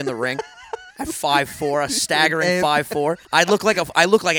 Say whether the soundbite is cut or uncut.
cut